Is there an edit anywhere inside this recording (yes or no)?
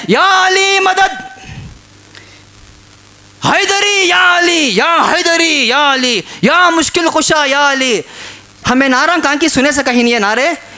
yes